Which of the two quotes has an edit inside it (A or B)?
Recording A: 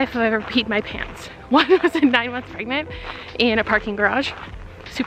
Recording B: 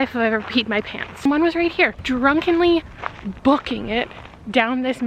B